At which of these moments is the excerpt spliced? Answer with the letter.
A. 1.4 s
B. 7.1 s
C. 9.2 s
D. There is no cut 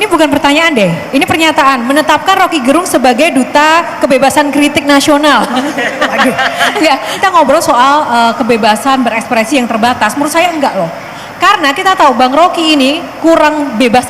B